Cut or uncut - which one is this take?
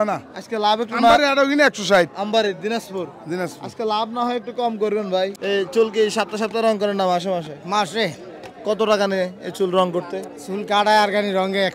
cut